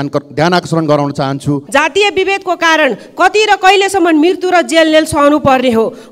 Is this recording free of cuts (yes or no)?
no